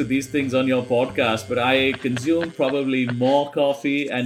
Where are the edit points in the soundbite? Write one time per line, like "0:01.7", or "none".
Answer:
none